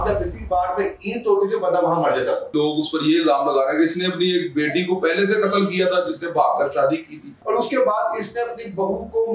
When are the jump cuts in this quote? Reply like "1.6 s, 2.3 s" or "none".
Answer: 2.5 s, 7.4 s